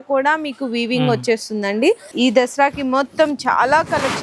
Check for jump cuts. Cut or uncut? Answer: cut